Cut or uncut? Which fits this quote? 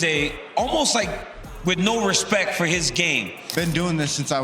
cut